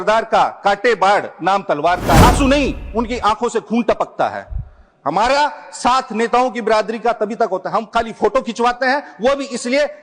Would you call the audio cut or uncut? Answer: cut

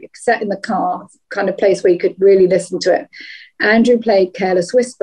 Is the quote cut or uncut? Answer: uncut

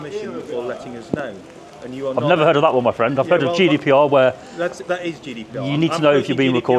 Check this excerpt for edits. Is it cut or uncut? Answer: uncut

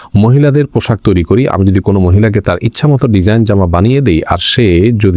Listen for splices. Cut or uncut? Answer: uncut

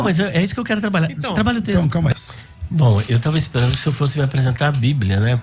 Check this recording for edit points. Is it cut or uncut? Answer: cut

